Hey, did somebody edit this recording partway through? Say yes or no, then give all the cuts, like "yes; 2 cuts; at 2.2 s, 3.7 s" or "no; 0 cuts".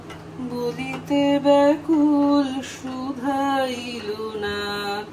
no; 0 cuts